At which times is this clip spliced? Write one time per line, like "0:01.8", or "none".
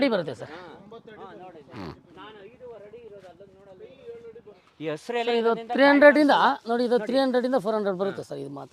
0:04.6

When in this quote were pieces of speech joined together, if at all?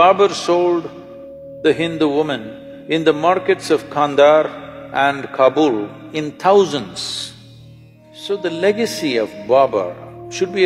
0:08.2

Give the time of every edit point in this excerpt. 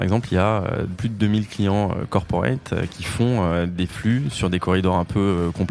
0:00.9

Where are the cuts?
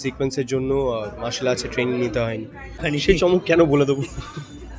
0:02.7

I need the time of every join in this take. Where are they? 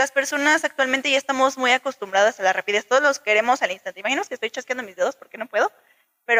none

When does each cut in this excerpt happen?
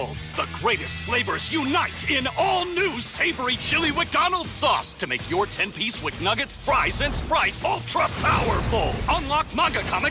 none

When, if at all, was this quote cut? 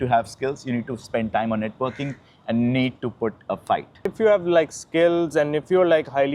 0:04.1

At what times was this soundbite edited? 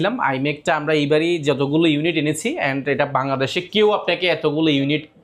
none

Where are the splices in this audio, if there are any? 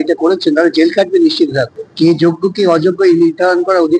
0:01.7

